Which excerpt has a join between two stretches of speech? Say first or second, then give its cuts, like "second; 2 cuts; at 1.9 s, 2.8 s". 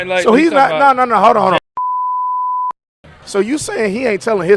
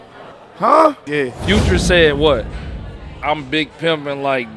second; 1 cut; at 1.0 s